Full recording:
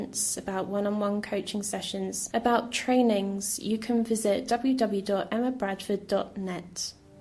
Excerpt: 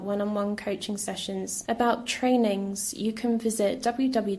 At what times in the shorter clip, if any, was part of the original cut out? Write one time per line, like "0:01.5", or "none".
none